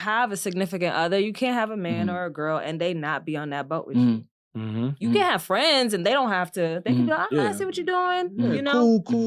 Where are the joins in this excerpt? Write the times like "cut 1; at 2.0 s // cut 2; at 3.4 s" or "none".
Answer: none